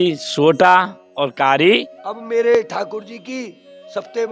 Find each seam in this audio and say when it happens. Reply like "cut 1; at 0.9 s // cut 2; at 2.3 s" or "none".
cut 1; at 1.9 s